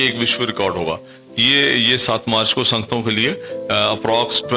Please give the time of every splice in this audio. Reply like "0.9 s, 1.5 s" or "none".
none